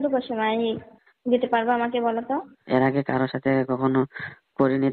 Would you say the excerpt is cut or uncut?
cut